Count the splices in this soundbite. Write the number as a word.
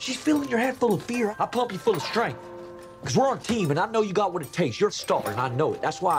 two